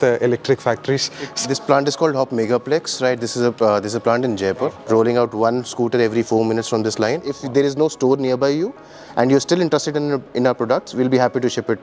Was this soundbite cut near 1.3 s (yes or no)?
yes